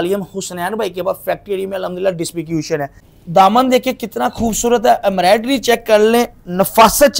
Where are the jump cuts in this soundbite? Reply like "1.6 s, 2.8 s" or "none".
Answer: 3.1 s